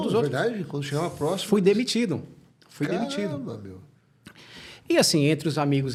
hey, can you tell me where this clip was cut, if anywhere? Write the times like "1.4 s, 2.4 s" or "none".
none